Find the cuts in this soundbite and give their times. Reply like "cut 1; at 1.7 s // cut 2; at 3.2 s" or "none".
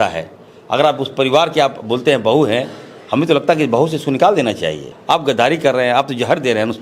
cut 1; at 4.9 s

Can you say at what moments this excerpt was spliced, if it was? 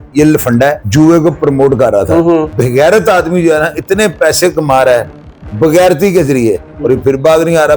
cut 1; at 0.8 s // cut 2; at 2.5 s

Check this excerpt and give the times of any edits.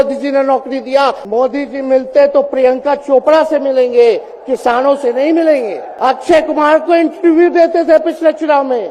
cut 1; at 1.2 s // cut 2; at 5.8 s

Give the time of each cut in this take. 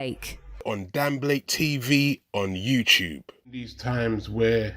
cut 1; at 3.1 s

